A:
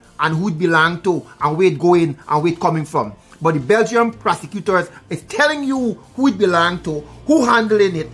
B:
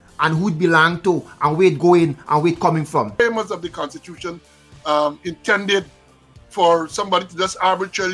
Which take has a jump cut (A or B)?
B